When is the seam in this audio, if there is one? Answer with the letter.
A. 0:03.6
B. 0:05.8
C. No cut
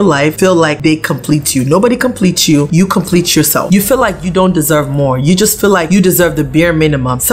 A